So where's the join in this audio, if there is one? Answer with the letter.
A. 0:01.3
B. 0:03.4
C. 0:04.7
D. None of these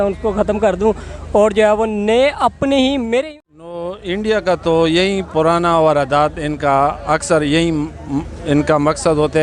B